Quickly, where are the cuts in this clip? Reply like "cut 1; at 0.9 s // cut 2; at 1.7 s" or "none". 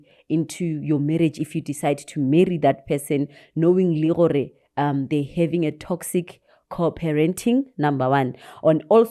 none